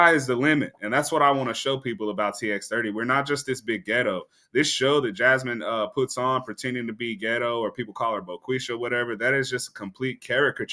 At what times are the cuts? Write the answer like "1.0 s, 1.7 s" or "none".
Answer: none